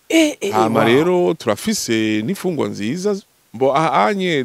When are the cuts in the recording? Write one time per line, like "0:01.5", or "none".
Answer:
0:03.3